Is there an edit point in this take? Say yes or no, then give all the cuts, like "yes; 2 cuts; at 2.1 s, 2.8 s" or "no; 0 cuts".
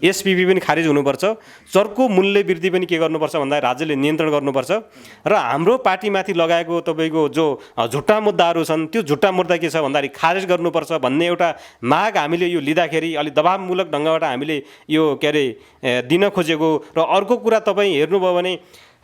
no; 0 cuts